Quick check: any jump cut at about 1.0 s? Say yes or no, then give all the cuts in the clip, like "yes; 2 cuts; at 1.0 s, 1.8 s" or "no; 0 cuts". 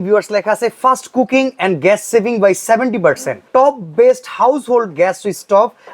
no; 1 cut; at 3.3 s